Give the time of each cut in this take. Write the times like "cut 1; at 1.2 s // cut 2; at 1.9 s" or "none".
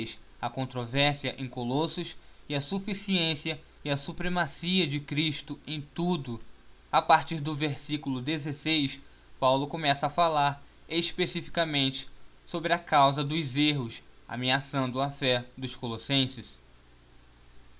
none